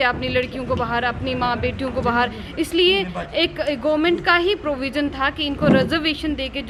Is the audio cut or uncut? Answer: uncut